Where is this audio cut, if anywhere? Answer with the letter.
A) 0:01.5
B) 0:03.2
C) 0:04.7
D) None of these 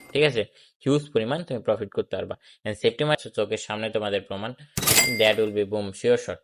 B